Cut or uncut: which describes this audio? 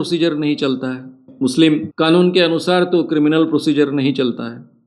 cut